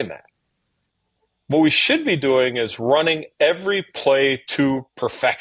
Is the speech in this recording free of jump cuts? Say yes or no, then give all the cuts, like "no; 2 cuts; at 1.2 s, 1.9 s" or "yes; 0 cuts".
yes; 0 cuts